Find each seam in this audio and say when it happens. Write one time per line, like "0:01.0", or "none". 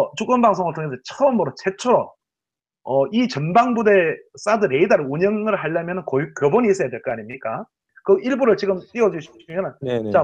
0:03.1